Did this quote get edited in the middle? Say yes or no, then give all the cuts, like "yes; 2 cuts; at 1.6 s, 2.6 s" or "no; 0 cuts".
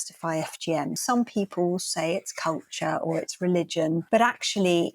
yes; 2 cuts; at 1.0 s, 4.0 s